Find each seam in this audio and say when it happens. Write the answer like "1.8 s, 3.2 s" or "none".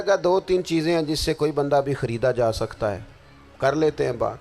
none

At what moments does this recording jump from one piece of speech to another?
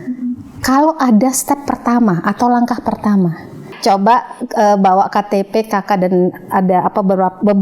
3.7 s

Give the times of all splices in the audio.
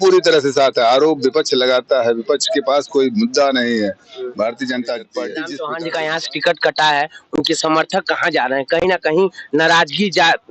5.5 s

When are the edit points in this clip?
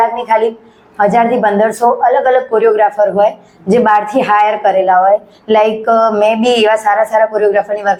none

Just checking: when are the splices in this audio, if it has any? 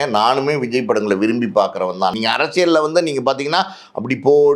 2.1 s

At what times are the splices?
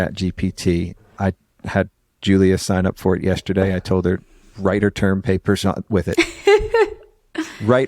1.0 s

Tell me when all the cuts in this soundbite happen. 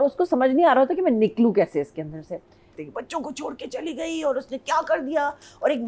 2.7 s

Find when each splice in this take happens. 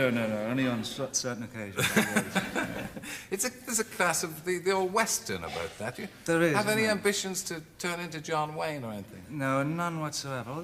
4.7 s

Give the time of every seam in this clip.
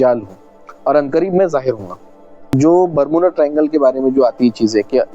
2.6 s

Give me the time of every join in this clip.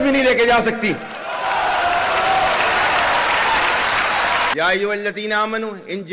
4.5 s

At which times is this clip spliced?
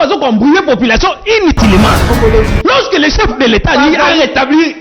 2.1 s

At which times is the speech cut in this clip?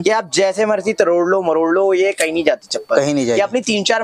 none

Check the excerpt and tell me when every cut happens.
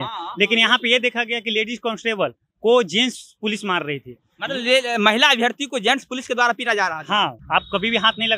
7.4 s

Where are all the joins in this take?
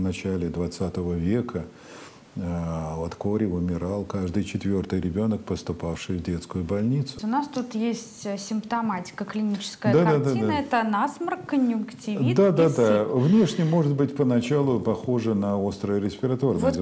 7.2 s

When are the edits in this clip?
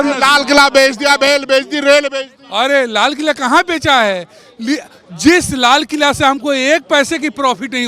none

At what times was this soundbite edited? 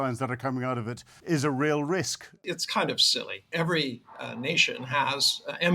1.1 s, 2.4 s, 3.5 s

